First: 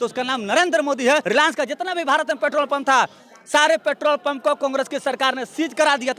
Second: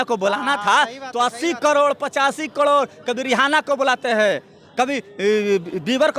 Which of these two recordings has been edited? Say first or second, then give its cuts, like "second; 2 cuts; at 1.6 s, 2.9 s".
first; 1 cut; at 1.2 s